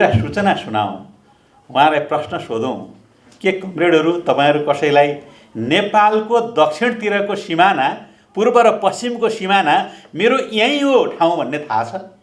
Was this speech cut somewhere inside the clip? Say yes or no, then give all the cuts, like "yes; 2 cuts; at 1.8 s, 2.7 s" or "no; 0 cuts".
no; 0 cuts